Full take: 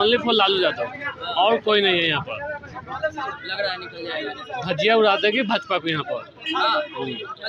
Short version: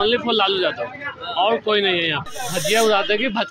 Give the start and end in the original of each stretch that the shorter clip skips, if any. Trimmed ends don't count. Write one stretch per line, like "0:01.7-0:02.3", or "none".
0:02.3-0:04.4